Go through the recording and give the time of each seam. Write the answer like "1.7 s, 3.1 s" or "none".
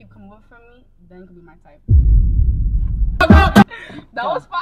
3.6 s